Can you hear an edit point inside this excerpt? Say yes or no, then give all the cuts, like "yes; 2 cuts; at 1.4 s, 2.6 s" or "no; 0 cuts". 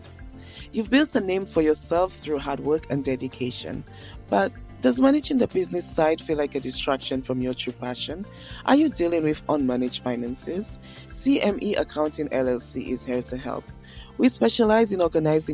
no; 0 cuts